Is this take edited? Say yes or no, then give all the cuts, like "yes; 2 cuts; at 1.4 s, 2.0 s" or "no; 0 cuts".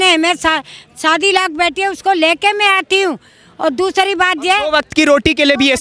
no; 0 cuts